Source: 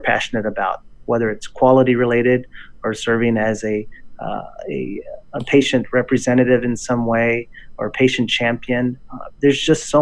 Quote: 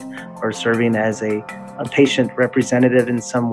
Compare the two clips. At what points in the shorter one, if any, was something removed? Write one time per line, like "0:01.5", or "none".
0:01.6

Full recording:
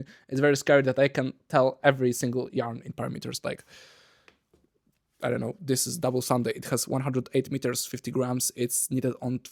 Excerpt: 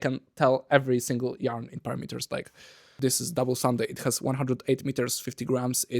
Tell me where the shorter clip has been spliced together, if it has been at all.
0:02.9

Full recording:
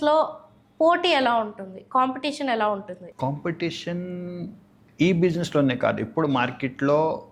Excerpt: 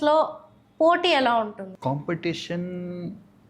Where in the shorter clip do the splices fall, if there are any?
0:01.7

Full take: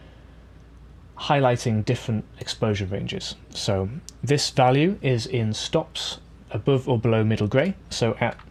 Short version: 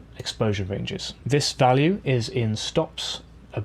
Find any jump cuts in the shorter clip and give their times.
0:01.1

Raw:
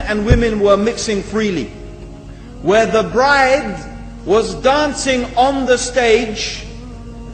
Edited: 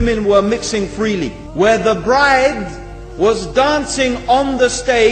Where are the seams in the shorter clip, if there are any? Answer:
0:01.4

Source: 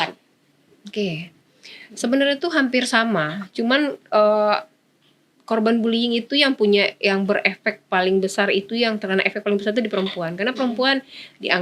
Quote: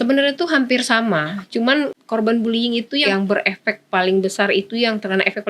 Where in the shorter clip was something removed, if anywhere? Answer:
0:02.0
0:03.0

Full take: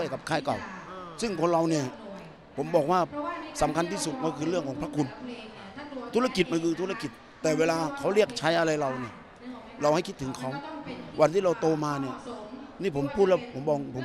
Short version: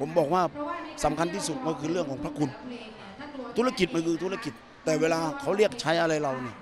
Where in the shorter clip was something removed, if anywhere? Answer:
none

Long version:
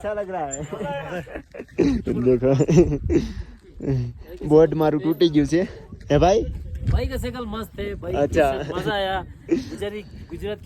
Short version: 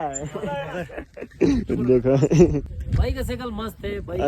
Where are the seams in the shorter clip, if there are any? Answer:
0:02.7

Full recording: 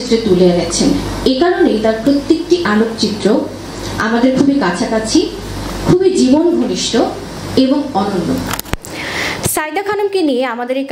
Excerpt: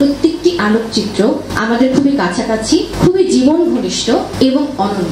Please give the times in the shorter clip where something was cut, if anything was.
0:01.5
0:02.9
0:04.3

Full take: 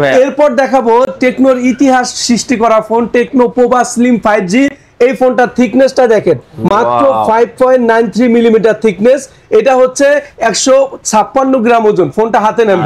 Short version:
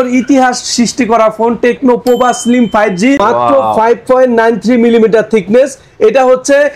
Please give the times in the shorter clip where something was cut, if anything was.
0:03.2

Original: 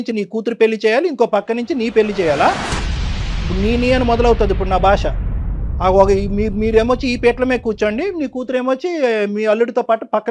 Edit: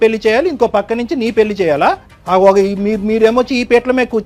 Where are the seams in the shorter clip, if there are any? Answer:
0:02.1

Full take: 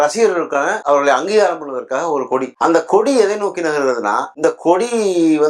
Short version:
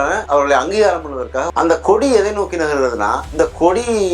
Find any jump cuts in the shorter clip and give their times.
0:01.5

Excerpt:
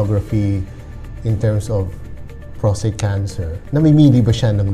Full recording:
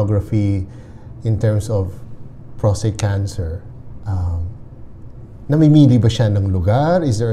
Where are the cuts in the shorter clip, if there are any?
0:03.6

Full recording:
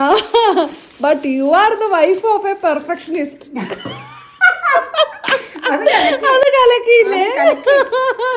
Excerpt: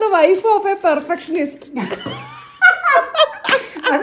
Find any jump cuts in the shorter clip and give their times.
none

